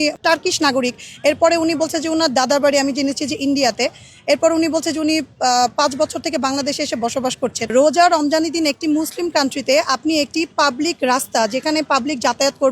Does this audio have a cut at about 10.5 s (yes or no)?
no